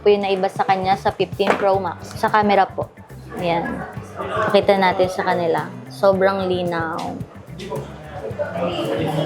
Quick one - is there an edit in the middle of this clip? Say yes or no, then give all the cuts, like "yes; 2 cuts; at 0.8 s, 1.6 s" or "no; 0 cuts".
yes; 1 cut; at 2.1 s